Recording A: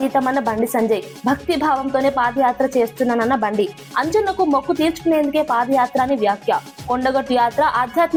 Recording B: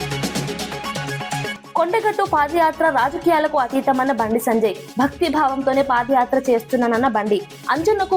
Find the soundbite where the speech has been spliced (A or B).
B